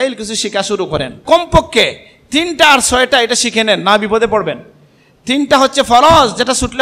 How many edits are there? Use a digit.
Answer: 1